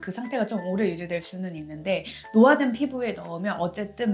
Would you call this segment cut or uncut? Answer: uncut